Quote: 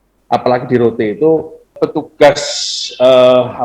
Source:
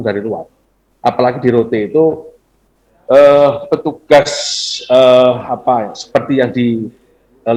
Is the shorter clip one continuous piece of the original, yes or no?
no